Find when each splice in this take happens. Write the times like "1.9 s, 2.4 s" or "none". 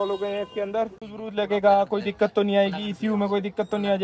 1.0 s